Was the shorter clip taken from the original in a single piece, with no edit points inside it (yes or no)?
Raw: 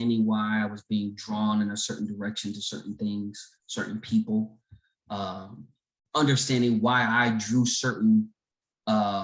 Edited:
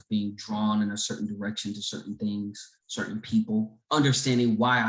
no